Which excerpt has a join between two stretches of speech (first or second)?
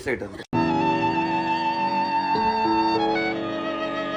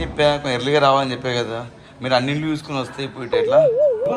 second